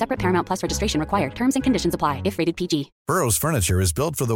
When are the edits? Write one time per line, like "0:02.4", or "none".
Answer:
0:02.9